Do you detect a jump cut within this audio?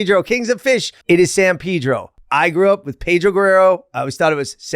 yes; 2 cuts; at 0.9 s, 2.1 s

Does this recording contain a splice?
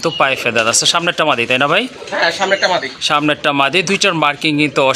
no; 0 cuts

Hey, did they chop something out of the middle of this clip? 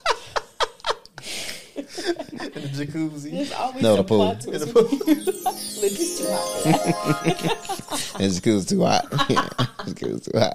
no; 0 cuts

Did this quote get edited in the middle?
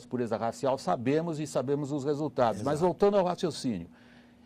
yes; 1 cut; at 2.0 s

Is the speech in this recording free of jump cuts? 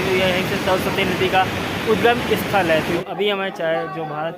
no; 1 cut; at 3.0 s

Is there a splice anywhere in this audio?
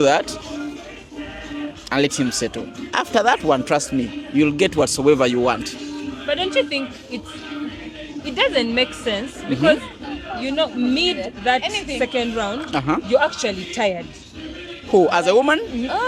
no; 0 cuts

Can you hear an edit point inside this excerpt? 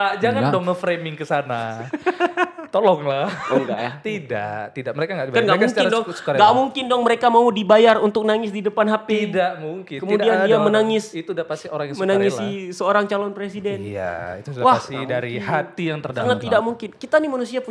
no; 0 cuts

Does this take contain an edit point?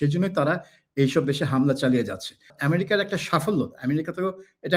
yes; 1 cut; at 2.5 s

